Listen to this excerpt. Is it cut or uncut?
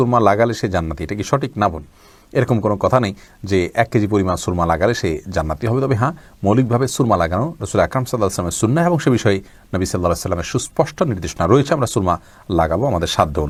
uncut